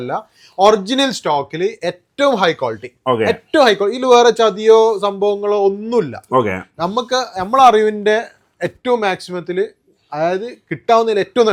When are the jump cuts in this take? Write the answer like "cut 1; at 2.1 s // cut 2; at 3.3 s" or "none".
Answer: none